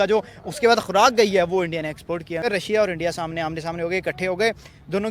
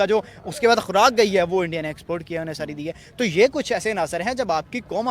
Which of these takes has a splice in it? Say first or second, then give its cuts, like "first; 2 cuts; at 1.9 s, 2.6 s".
first; 1 cut; at 2.4 s